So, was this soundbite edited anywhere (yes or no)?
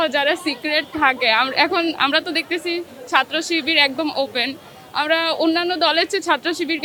no